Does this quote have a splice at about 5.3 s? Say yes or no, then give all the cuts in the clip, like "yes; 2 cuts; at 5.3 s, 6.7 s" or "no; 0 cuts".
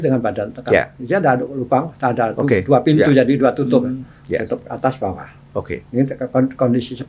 no; 0 cuts